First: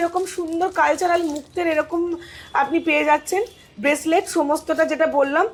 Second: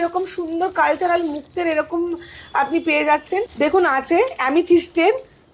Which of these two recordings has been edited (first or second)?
second